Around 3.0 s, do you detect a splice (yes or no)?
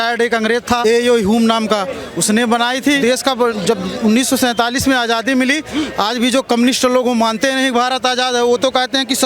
yes